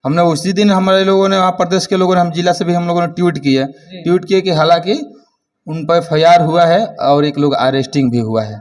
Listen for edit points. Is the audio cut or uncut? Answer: uncut